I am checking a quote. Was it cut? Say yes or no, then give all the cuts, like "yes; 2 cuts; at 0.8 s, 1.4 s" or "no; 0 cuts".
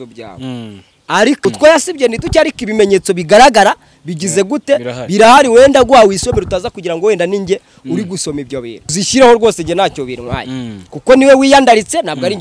yes; 2 cuts; at 1.4 s, 8.9 s